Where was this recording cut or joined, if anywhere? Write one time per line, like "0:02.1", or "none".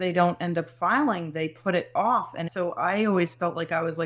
0:02.4

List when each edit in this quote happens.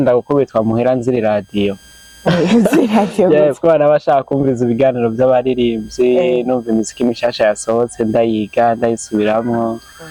none

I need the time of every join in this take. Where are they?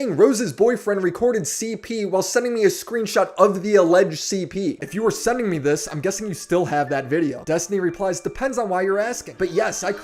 0:04.8

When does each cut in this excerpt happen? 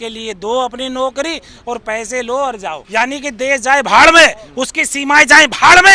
0:02.8

